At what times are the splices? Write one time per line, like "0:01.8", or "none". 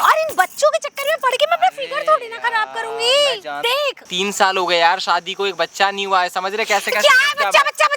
0:04.0